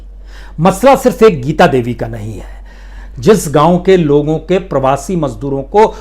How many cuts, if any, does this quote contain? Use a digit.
1